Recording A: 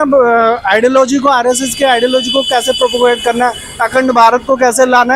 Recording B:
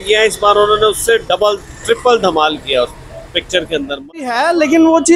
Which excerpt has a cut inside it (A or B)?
B